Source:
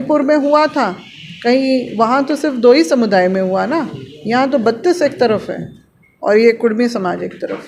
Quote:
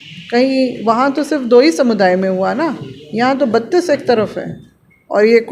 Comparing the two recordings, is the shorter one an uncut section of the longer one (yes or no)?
yes